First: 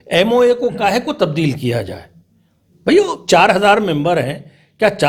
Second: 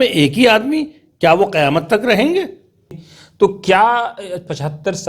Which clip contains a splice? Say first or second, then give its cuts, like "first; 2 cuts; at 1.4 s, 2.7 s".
second; 1 cut; at 3.0 s